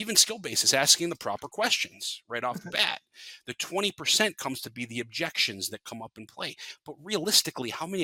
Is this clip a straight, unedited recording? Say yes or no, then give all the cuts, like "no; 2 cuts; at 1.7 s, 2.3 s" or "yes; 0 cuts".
yes; 0 cuts